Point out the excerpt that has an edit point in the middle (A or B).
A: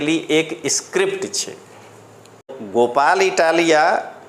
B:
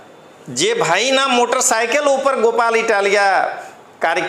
A